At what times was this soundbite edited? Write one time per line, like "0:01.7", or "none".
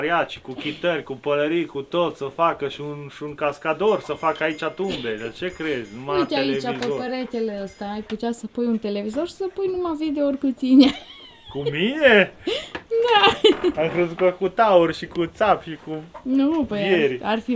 none